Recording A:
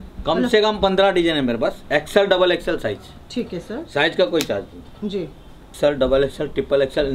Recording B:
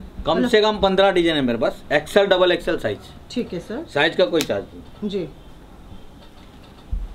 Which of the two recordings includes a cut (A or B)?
A